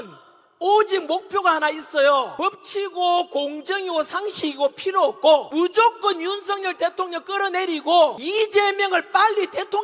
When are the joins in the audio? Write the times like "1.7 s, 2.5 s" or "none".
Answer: 2.3 s, 5.5 s, 8.2 s